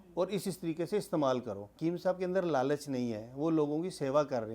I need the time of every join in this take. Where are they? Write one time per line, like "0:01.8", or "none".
0:01.8

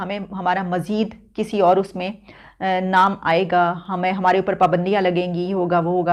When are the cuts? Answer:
none

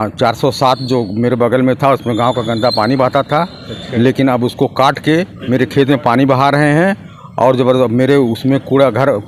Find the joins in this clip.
none

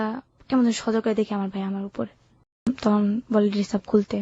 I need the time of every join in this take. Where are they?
0:02.6

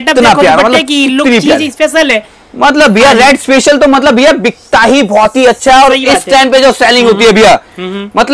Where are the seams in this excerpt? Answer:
none

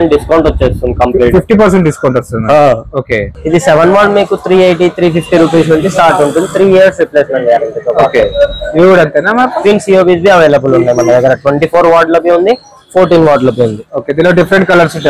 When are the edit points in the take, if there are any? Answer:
0:03.3

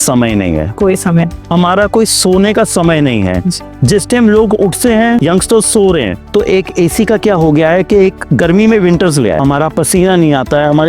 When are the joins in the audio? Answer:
0:05.2
0:06.2
0:09.4

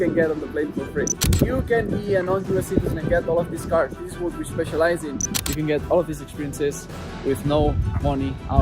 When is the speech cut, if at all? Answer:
0:01.3
0:05.3

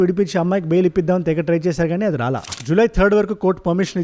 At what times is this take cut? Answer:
0:02.5

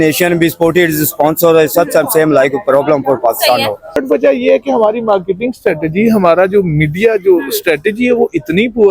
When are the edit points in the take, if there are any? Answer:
0:04.0

